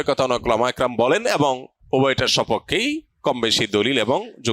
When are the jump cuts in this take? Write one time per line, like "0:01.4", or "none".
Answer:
0:01.7